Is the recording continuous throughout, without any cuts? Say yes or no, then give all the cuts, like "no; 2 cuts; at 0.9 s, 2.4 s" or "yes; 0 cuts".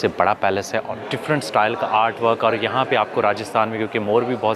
no; 1 cut; at 0.9 s